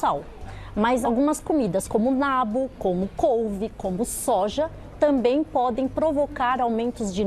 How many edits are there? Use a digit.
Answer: 1